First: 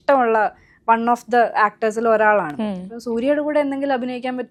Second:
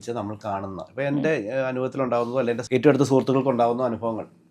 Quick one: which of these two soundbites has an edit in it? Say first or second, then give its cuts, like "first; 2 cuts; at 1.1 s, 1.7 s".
second; 1 cut; at 2.6 s